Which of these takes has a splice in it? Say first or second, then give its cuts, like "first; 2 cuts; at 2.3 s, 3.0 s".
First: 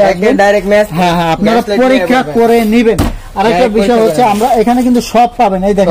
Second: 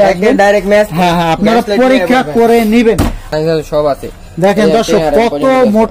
second; 1 cut; at 3.3 s